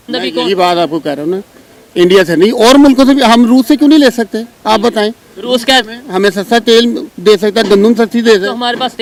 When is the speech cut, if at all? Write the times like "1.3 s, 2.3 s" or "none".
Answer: none